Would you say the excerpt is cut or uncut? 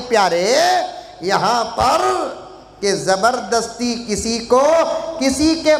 uncut